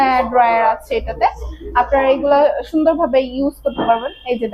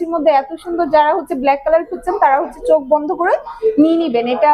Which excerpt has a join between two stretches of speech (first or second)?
second